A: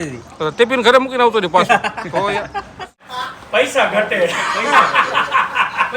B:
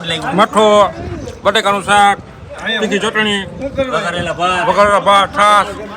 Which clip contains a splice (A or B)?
A